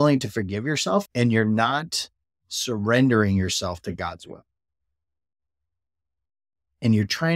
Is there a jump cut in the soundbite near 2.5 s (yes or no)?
no